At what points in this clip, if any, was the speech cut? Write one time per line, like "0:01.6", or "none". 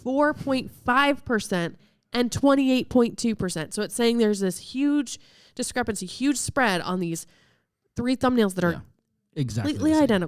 none